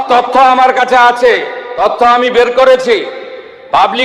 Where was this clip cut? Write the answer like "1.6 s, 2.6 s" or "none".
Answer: 1.6 s